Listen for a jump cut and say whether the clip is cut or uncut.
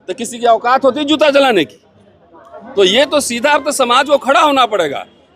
uncut